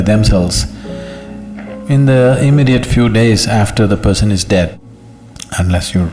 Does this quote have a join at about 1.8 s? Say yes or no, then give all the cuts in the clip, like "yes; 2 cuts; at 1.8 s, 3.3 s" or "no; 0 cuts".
no; 1 cut; at 4.7 s